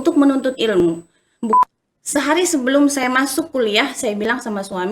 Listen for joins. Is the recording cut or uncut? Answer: cut